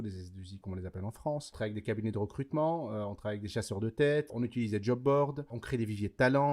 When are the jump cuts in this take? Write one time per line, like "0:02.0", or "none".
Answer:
0:01.5
0:04.3
0:05.6